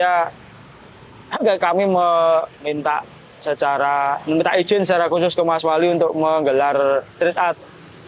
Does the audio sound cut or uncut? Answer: uncut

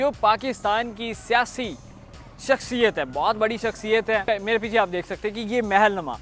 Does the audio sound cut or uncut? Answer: cut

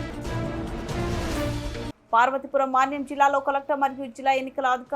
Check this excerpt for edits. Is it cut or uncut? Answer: cut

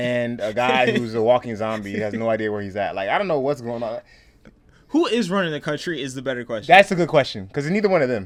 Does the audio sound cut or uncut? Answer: uncut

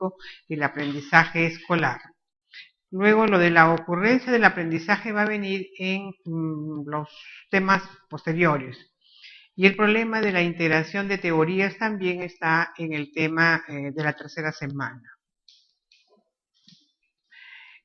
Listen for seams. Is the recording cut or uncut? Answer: uncut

